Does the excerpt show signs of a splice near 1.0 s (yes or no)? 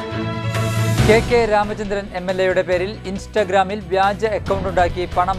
yes